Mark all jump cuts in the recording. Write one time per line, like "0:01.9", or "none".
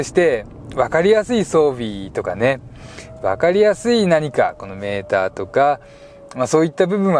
none